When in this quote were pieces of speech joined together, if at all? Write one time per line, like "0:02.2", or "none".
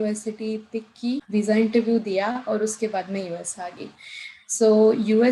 0:01.2